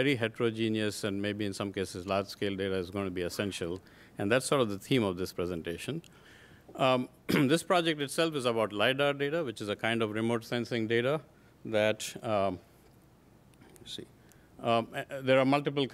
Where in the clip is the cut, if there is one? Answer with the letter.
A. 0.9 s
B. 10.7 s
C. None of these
C